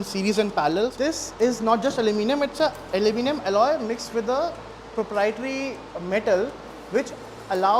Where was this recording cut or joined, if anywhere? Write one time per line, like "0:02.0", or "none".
0:01.0